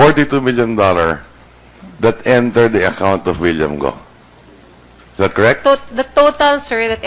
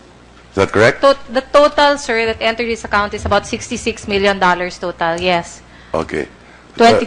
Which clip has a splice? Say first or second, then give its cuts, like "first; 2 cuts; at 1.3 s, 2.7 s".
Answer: first; 1 cut; at 1.2 s